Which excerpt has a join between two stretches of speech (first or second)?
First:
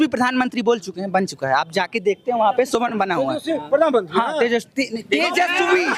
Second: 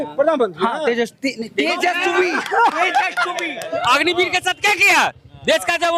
second